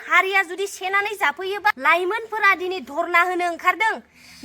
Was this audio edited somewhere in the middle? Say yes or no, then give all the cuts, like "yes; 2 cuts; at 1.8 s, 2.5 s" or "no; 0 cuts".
yes; 1 cut; at 1.8 s